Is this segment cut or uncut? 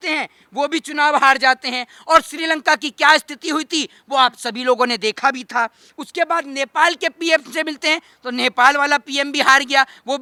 uncut